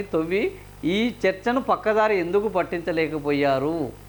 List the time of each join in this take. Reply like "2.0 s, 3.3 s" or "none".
none